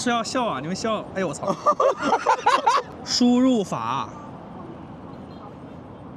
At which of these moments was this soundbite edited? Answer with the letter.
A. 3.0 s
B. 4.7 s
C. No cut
A